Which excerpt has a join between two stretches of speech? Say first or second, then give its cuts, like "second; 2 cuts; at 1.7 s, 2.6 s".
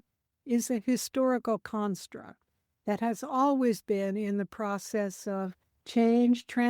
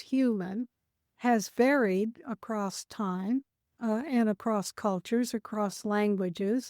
second; 2 cuts; at 1.1 s, 3.6 s